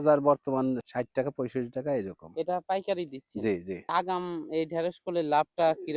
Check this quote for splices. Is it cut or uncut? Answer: uncut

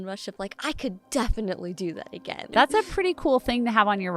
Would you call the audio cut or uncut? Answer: cut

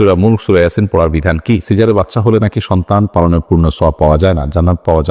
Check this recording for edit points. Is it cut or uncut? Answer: cut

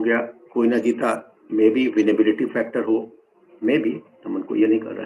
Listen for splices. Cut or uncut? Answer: uncut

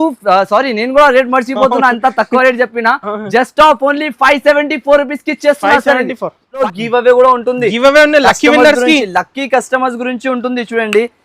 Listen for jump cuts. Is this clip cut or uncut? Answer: cut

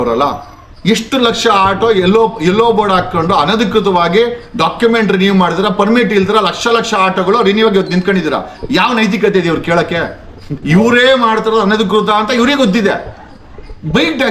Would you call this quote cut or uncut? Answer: uncut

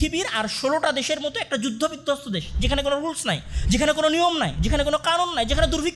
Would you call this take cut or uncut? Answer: uncut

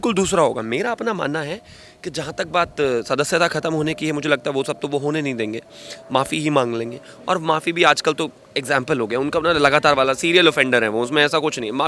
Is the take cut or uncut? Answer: uncut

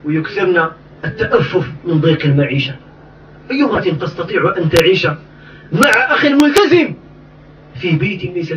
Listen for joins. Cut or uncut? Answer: cut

